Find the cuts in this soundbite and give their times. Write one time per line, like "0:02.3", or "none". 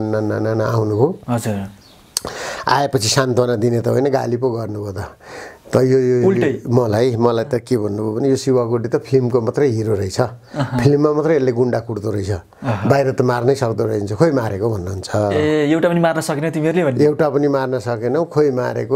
none